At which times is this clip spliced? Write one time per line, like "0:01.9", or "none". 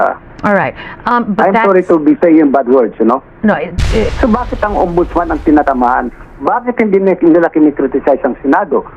0:04.1